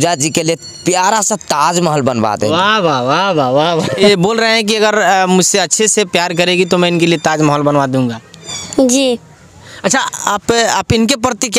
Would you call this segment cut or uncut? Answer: uncut